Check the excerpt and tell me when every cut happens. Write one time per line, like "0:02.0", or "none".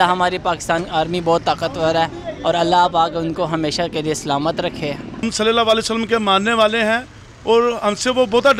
0:05.2